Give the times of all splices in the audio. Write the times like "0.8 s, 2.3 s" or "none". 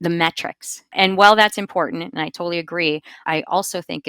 0.9 s, 3.2 s